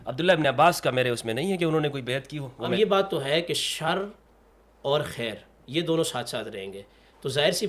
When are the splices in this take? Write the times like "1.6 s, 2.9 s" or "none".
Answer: 2.4 s